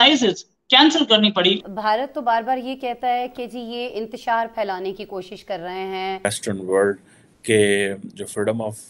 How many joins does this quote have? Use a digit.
2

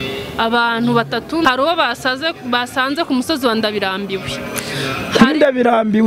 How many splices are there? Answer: 1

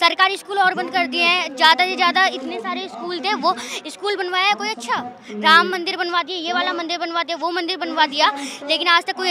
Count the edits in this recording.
0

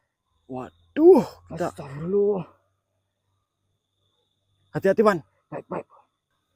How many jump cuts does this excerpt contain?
0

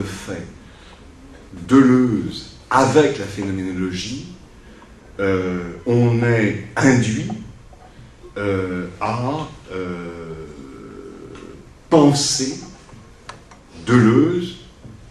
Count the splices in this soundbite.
1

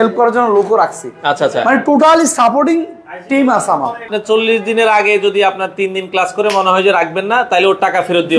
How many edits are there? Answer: 1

